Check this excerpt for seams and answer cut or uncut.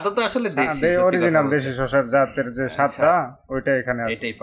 uncut